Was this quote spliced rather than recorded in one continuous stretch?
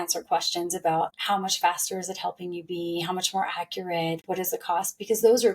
yes; 1 cut; at 1.2 s

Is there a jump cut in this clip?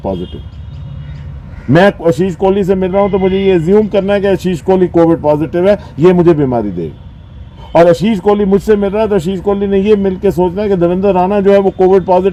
no; 0 cuts

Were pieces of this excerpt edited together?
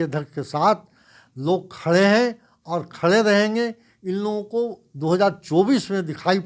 no; 0 cuts

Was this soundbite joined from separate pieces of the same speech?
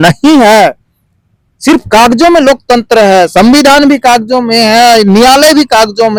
no; 0 cuts

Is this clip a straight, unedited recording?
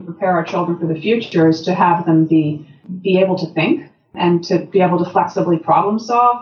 yes; 0 cuts

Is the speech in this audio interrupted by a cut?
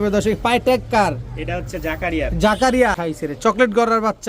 yes; 1 cut; at 3.0 s

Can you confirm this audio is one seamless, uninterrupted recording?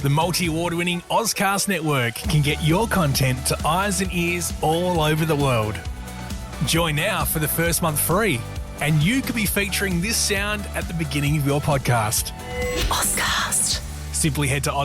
yes; 0 cuts

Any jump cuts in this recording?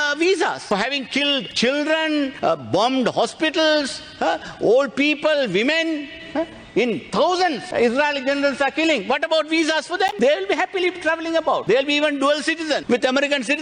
no; 0 cuts

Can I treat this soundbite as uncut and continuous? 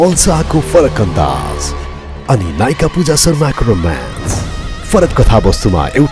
yes; 0 cuts

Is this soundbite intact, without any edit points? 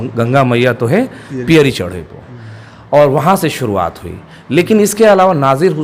yes; 0 cuts

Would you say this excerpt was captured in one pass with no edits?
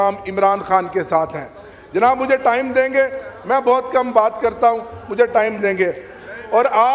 yes; 0 cuts

